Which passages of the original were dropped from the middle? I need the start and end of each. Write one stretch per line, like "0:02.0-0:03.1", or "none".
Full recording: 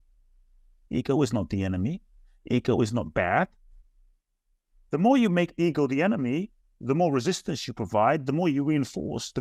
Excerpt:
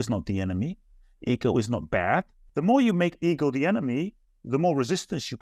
0:03.6-0:04.7

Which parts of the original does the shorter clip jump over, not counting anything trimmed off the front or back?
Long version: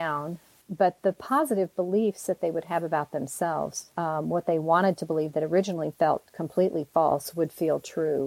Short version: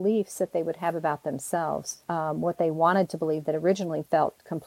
none

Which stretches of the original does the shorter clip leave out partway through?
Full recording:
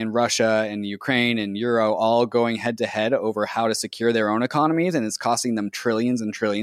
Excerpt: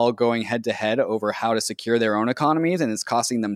none

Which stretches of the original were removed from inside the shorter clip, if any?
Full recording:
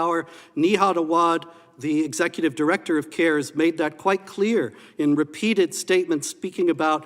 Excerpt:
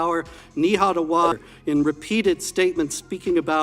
0:01.5-0:04.8

